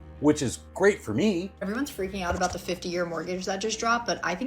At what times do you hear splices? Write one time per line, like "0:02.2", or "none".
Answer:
0:01.5